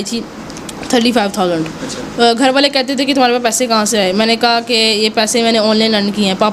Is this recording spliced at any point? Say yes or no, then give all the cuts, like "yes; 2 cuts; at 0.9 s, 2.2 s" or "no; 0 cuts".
no; 0 cuts